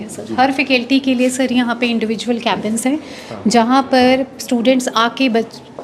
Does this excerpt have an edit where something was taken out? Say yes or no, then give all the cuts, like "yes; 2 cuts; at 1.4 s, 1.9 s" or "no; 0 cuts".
no; 0 cuts